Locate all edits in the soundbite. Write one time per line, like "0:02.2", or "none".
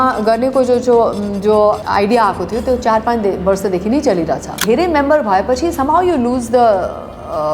0:01.8
0:04.6